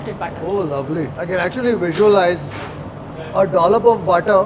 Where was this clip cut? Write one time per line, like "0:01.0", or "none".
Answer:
0:01.2

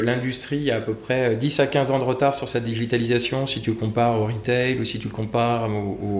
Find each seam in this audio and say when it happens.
none

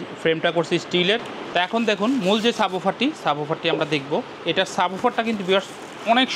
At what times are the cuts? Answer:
0:01.4

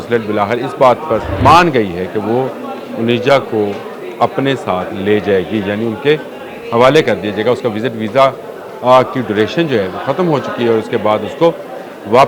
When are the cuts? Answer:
0:01.3

